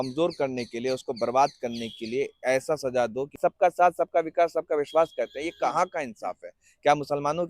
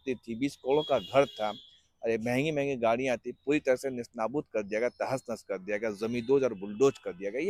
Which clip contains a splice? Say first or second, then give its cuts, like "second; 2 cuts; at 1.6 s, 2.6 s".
first; 1 cut; at 3.4 s